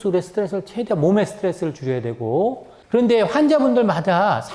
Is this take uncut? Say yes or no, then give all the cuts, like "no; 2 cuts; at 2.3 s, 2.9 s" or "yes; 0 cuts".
no; 1 cut; at 2.7 s